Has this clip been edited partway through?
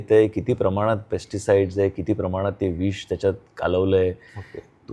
no; 0 cuts

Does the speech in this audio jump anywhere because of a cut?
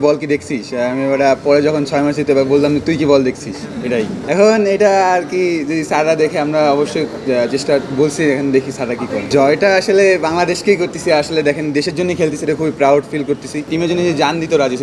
yes; 3 cuts; at 4.2 s, 9.2 s, 13.7 s

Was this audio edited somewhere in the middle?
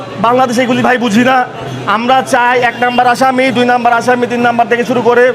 no; 0 cuts

